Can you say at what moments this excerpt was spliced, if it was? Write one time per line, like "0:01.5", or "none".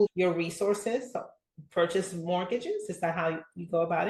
none